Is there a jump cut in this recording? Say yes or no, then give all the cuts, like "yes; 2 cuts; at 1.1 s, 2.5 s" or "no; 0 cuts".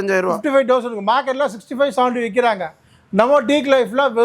no; 0 cuts